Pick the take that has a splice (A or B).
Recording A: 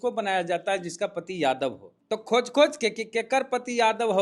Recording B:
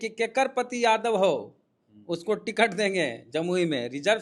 A